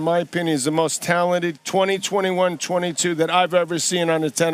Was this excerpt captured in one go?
no; 1 cut; at 1.6 s

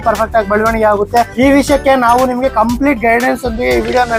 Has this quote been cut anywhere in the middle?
yes; 1 cut; at 1.3 s

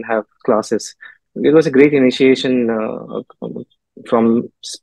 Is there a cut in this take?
yes; 1 cut; at 1.2 s

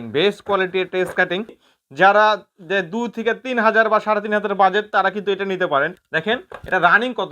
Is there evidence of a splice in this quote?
yes; 2 cuts; at 1.6 s, 6.0 s

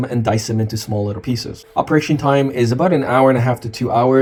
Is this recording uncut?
yes; 0 cuts

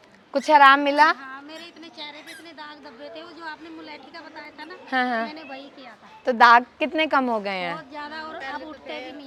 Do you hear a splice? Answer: no; 0 cuts

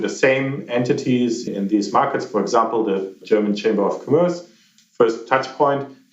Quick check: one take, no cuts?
no; 1 cut; at 1.5 s

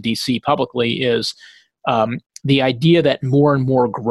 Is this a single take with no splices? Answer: yes; 0 cuts

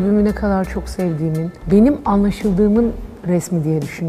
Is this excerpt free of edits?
no; 1 cut; at 1.6 s

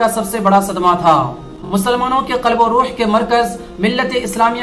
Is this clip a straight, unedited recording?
yes; 0 cuts

